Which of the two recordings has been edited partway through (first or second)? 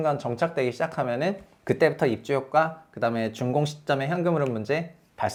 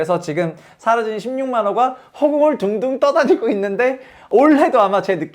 second